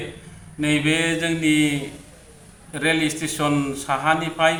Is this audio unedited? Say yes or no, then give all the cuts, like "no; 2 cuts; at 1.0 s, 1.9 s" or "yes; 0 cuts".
yes; 0 cuts